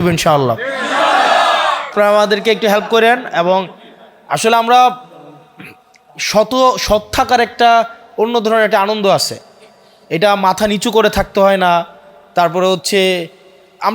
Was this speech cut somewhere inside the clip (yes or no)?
yes